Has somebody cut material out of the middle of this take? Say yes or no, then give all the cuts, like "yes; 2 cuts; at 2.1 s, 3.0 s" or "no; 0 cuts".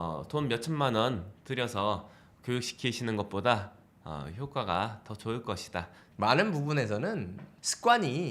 yes; 1 cut; at 6.0 s